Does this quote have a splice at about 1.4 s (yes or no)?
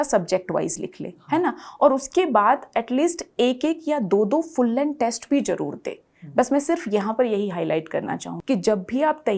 no